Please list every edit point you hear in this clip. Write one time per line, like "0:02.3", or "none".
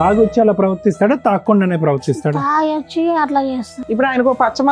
0:03.7